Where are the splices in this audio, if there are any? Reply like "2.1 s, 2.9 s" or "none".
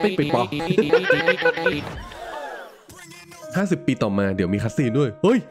1.9 s